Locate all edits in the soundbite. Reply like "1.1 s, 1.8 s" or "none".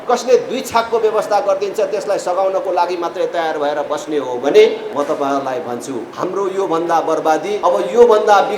4.9 s, 6.1 s, 7.6 s